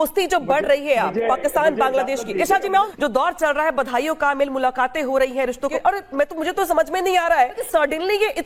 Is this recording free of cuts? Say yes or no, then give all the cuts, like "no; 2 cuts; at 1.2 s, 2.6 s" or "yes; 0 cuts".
no; 3 cuts; at 2.9 s, 5.7 s, 7.6 s